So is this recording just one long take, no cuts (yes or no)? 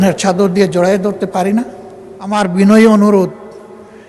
no